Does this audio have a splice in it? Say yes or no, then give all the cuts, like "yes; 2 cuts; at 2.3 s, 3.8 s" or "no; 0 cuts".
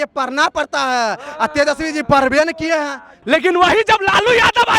yes; 1 cut; at 3.1 s